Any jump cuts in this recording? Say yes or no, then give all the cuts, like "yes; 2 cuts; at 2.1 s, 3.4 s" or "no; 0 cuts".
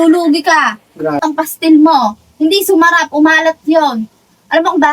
yes; 1 cut; at 1.2 s